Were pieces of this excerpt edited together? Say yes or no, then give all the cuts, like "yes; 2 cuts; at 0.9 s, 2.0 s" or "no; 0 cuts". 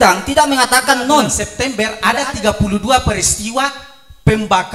yes; 1 cut; at 1.5 s